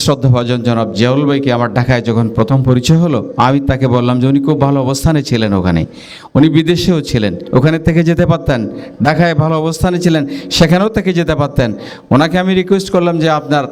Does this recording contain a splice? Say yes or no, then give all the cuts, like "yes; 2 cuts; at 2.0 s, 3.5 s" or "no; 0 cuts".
no; 0 cuts